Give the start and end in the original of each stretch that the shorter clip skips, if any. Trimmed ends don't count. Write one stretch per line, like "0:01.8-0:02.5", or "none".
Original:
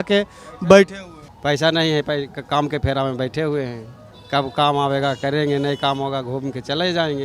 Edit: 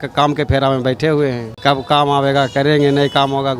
0:03.8-0:04.1